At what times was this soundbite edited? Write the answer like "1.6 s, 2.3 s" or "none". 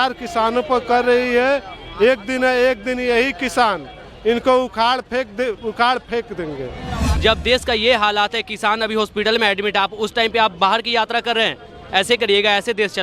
7.0 s